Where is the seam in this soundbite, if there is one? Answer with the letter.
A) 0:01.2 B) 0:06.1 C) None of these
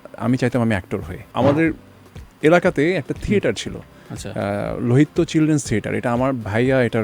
A